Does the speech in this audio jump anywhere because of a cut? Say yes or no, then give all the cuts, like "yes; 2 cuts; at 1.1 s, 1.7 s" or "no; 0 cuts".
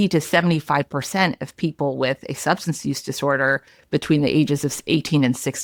no; 0 cuts